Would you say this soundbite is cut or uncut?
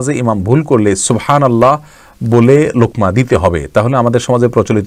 uncut